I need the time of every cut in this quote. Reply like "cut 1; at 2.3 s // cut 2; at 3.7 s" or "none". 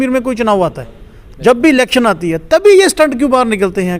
none